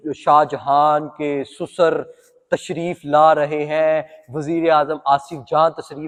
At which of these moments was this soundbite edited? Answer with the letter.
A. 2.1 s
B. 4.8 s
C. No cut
C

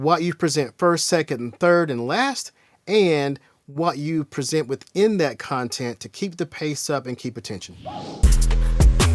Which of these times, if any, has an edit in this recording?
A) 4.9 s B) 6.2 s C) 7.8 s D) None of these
C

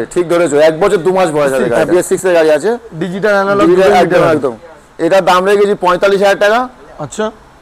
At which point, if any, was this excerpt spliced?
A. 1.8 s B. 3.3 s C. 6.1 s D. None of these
A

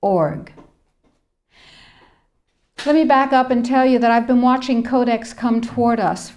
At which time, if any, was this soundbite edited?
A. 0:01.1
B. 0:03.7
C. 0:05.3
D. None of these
A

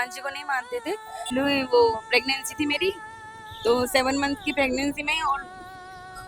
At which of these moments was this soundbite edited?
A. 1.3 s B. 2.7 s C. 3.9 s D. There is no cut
A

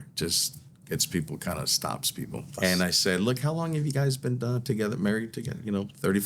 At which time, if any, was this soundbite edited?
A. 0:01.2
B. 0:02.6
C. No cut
B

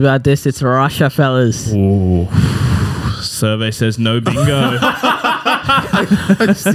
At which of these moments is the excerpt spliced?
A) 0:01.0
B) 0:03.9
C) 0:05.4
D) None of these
D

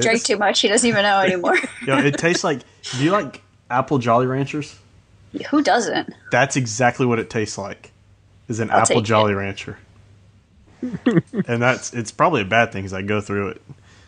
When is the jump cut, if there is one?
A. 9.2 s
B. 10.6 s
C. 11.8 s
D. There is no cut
A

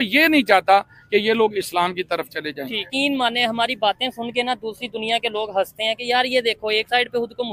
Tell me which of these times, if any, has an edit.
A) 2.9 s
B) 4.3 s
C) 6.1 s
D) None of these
A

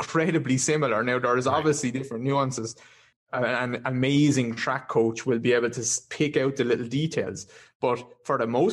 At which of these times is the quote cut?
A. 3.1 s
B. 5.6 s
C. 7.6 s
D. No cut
A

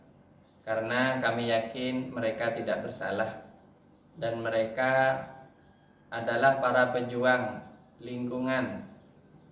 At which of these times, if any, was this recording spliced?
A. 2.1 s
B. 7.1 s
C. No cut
C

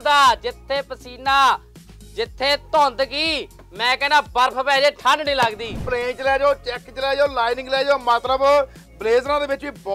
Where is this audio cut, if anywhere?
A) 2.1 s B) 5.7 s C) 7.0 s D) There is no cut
B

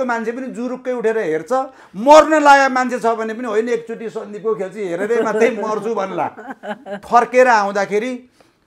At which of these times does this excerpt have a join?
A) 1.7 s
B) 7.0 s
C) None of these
B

